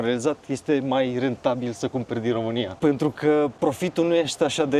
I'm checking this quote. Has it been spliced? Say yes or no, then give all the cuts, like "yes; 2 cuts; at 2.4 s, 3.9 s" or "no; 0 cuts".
no; 0 cuts